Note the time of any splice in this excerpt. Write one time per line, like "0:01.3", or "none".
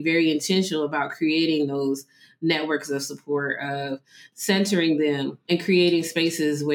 0:05.5